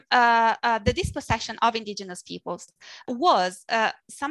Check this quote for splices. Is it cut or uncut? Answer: cut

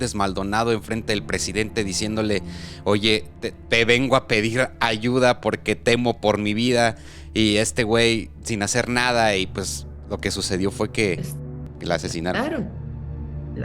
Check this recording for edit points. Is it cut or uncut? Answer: cut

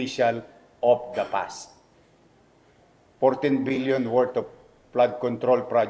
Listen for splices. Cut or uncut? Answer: cut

